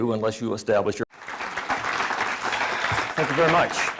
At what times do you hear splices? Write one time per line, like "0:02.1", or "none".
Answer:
none